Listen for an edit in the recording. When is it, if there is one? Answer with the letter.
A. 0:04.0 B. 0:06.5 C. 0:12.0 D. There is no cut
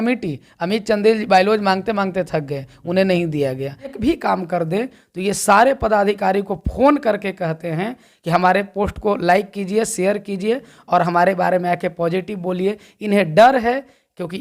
A